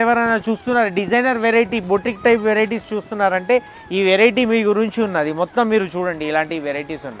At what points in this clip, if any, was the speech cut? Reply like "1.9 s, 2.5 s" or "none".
none